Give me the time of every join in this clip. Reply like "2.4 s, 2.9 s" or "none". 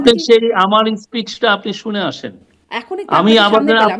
none